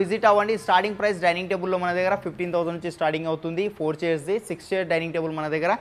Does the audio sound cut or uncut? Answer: uncut